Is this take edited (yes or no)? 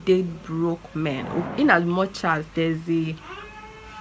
yes